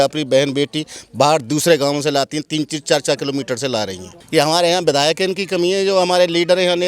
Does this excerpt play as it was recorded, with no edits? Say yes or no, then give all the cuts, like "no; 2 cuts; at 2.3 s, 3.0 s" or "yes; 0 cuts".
no; 1 cut; at 4.1 s